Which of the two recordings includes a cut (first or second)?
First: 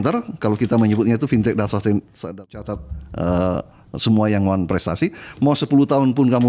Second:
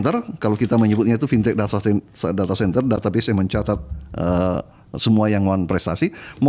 first